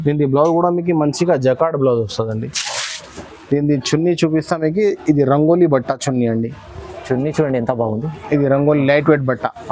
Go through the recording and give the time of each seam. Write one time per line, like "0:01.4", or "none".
none